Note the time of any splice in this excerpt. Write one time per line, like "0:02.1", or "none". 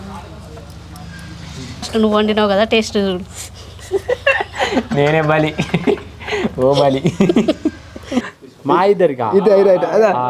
0:01.9
0:08.4